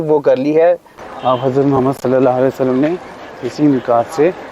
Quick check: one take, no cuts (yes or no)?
no